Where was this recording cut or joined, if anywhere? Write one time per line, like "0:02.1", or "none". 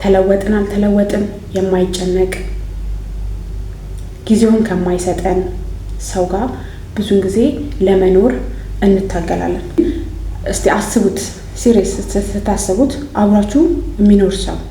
0:09.8